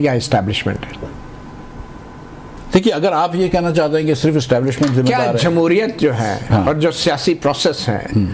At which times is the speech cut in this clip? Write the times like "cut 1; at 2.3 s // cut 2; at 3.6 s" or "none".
cut 1; at 2.6 s